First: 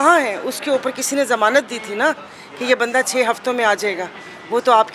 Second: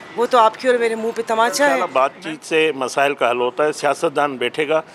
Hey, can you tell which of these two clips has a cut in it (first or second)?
second